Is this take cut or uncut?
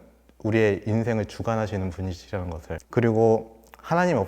cut